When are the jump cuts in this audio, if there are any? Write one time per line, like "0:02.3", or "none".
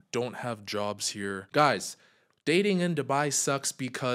0:01.4